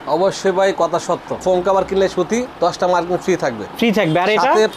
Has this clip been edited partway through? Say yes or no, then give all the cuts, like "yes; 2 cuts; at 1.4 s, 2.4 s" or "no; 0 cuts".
yes; 1 cut; at 1.4 s